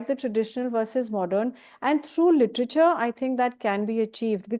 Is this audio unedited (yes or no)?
yes